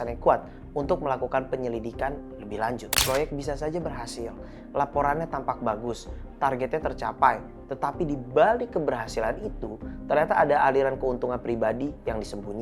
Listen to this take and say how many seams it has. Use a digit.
1